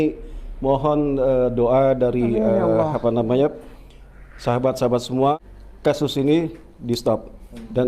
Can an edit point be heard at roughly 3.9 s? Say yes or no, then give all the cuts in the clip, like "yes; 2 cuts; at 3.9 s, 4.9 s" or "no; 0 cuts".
no; 1 cut; at 5.4 s